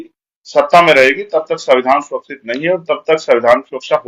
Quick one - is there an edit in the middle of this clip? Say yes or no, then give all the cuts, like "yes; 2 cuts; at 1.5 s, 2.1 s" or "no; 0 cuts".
no; 0 cuts